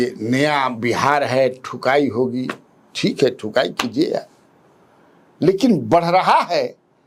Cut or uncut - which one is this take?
uncut